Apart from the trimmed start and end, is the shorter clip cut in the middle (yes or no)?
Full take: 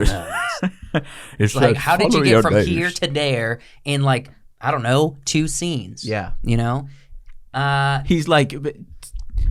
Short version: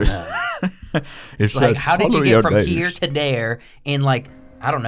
no